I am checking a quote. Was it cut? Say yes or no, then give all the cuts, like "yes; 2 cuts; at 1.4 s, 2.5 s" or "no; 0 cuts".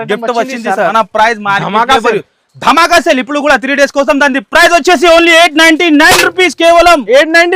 yes; 1 cut; at 0.9 s